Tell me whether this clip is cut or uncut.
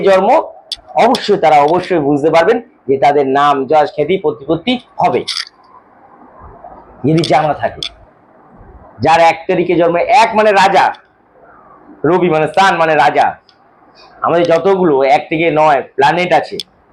uncut